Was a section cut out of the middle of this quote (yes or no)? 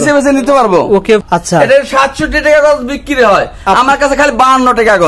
yes